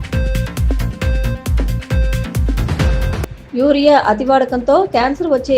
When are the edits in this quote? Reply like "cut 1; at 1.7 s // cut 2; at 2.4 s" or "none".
cut 1; at 1.3 s